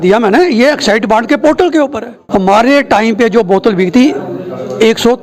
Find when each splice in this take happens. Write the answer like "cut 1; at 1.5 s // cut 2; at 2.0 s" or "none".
cut 1; at 2.1 s